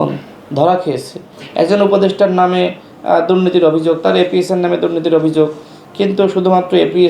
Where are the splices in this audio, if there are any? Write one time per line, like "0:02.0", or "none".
0:01.4